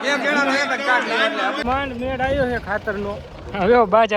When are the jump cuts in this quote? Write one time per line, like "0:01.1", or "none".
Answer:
0:01.6